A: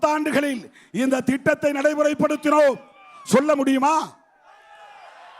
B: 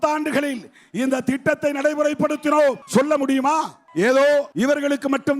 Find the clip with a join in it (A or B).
B